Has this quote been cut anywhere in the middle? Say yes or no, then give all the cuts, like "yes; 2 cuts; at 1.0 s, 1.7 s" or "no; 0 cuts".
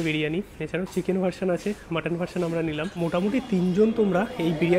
yes; 1 cut; at 3.0 s